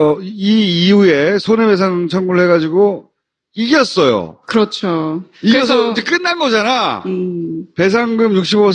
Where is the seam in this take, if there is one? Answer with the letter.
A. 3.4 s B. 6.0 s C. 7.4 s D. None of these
C